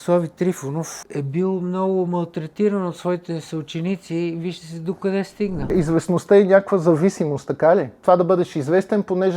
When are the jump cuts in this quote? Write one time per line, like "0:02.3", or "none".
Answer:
0:00.9
0:05.7
0:07.9